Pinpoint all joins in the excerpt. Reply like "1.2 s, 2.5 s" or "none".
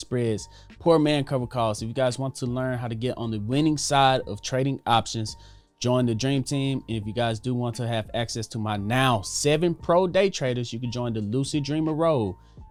none